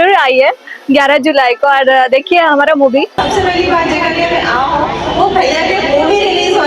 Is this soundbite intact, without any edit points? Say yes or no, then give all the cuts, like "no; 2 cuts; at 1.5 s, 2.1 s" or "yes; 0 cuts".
no; 1 cut; at 3.3 s